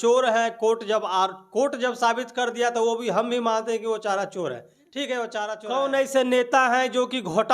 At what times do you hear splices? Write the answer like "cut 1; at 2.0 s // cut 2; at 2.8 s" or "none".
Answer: cut 1; at 5.6 s

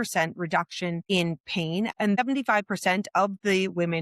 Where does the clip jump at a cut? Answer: cut 1; at 1.0 s // cut 2; at 1.9 s

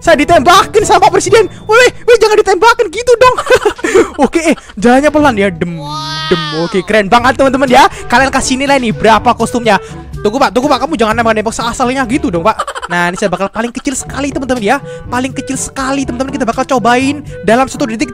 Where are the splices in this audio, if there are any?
cut 1; at 9.9 s

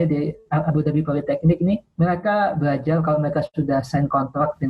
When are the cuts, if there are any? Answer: cut 1; at 1.9 s

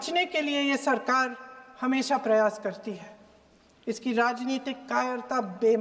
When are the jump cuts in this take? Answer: none

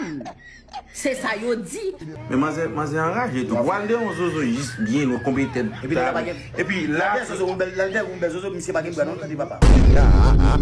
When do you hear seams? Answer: cut 1; at 2.1 s

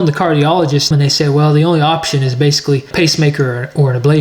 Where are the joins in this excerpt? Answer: cut 1; at 0.9 s // cut 2; at 2.9 s

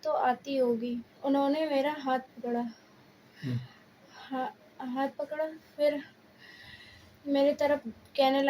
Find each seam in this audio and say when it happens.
cut 1; at 1.1 s

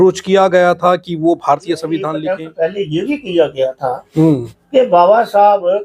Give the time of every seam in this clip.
cut 1; at 2.2 s

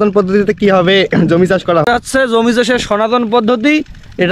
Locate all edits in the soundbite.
cut 1; at 1.9 s

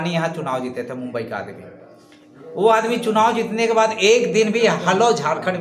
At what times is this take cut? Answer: none

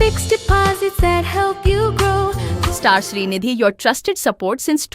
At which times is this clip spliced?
cut 1; at 2.5 s

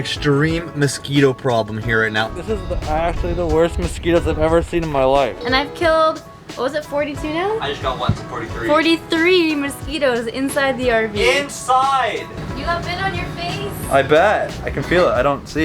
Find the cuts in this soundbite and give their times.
cut 1; at 2.3 s // cut 2; at 5.4 s // cut 3; at 12.4 s

